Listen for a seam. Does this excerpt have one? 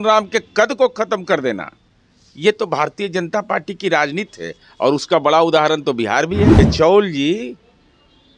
yes; 1 cut; at 6.6 s

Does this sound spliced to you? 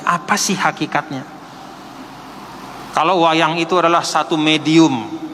no; 0 cuts

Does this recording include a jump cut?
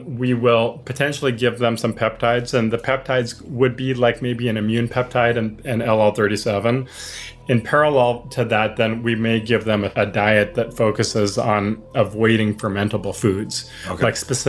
yes; 2 cuts; at 7.2 s, 9.9 s

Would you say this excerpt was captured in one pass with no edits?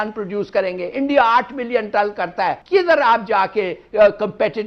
no; 1 cut; at 2.6 s

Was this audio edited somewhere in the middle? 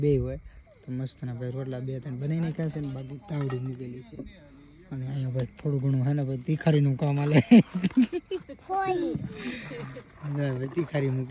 no; 0 cuts

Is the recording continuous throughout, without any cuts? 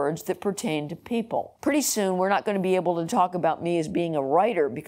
no; 1 cut; at 1.5 s

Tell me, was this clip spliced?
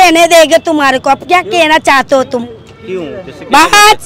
no; 0 cuts

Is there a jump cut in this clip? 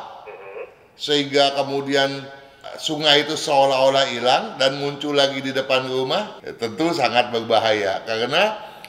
yes; 1 cut; at 6.4 s

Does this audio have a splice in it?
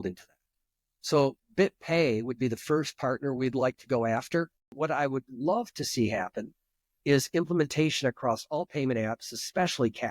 yes; 1 cut; at 4.7 s

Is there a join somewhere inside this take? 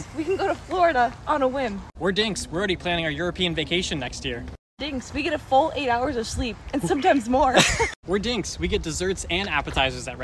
no; 0 cuts

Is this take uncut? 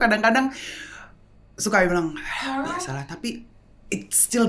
yes; 0 cuts

